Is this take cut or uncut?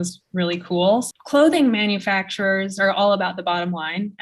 cut